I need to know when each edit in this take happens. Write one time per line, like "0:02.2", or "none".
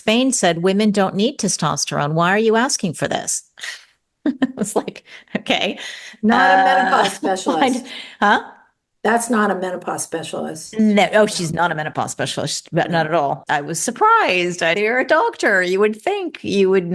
0:13.5
0:14.7